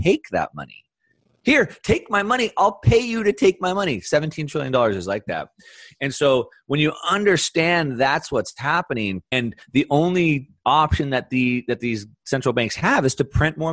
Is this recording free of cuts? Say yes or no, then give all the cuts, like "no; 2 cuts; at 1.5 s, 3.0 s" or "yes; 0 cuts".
no; 1 cut; at 9.3 s